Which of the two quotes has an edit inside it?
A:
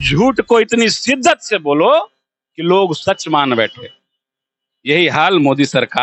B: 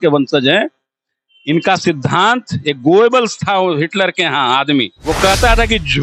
B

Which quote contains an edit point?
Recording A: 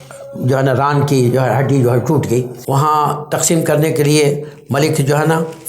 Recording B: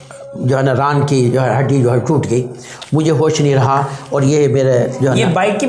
A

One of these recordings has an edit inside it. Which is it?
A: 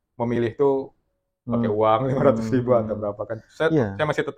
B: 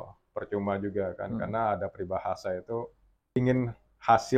B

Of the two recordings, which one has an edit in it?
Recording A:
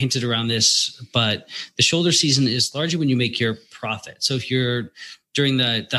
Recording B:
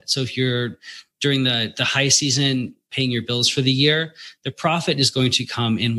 B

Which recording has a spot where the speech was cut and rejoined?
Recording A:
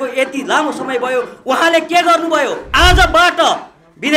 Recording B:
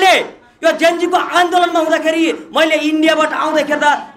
A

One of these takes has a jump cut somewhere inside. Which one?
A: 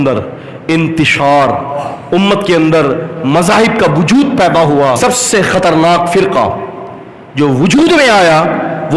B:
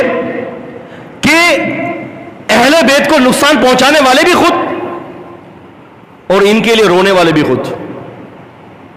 A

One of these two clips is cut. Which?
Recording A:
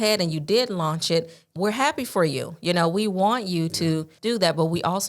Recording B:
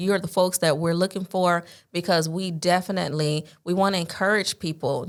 A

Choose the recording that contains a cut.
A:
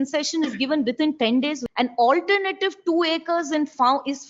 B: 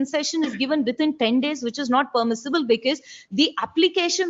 A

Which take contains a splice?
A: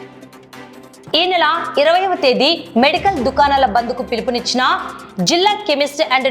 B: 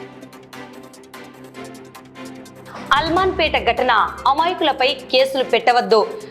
A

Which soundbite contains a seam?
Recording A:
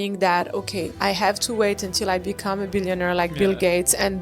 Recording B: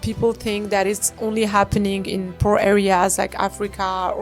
A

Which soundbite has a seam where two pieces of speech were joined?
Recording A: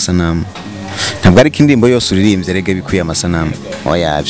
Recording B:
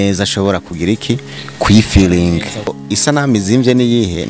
B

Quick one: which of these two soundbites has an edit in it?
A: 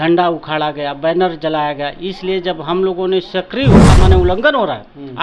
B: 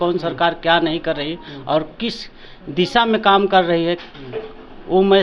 A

